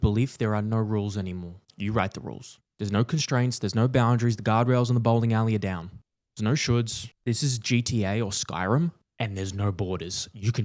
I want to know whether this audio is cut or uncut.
uncut